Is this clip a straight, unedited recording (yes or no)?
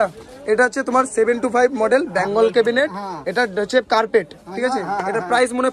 yes